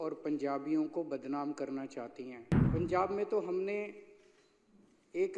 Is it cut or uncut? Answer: cut